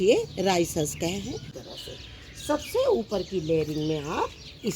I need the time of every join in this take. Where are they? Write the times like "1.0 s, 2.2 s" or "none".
1.5 s